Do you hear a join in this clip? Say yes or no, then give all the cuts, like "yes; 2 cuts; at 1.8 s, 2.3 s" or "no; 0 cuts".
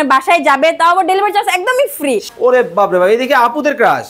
yes; 1 cut; at 2.3 s